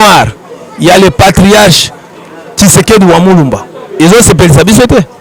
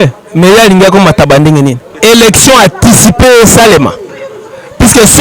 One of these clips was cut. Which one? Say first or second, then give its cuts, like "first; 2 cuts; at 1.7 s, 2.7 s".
second; 1 cut; at 2.0 s